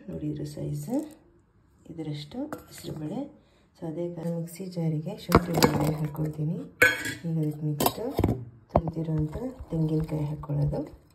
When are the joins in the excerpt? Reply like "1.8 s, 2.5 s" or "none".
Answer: 4.2 s